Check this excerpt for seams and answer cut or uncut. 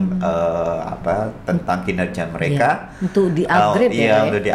uncut